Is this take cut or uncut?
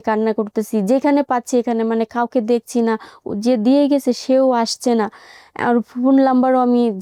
uncut